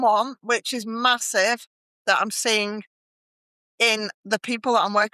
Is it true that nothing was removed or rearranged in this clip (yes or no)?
yes